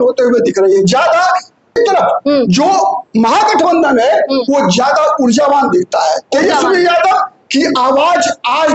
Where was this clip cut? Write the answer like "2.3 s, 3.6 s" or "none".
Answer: 1.8 s

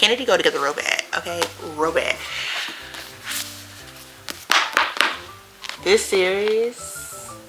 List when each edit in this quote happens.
none

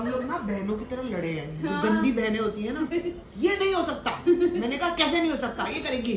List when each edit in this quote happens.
none

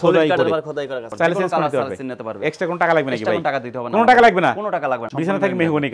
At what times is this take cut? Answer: 1.0 s, 5.1 s

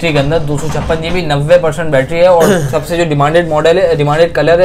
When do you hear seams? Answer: none

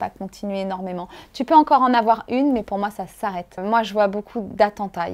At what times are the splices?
3.5 s

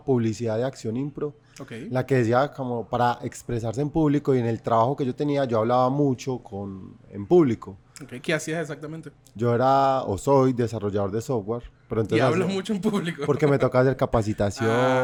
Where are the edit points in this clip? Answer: none

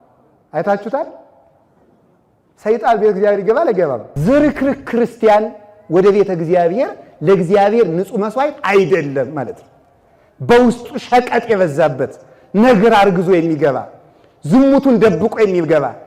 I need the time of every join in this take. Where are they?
4.1 s

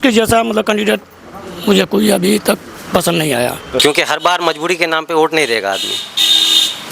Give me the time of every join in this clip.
3.8 s

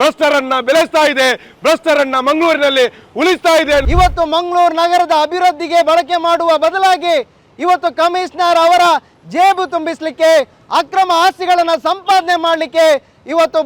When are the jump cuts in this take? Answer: 3.9 s

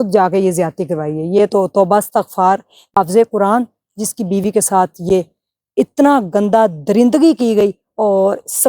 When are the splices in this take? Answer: 2.8 s

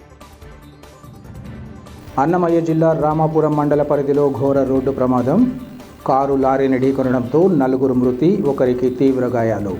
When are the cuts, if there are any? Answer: 1.2 s

